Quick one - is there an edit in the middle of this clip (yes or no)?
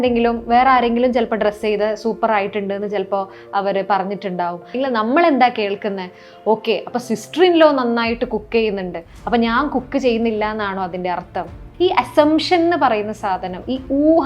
yes